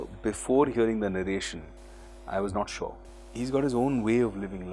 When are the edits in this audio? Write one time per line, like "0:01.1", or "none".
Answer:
0:03.1